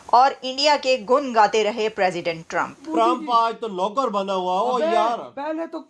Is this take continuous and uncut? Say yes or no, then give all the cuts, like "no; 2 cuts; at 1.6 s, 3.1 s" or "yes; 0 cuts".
no; 1 cut; at 2.8 s